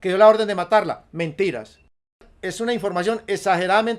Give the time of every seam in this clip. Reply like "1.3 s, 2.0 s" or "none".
2.3 s